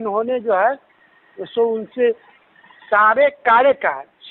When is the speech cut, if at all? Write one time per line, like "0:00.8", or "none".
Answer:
none